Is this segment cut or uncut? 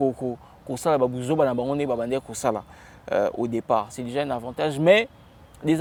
uncut